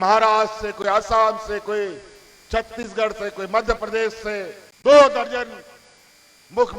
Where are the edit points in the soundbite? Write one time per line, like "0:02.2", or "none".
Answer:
0:04.6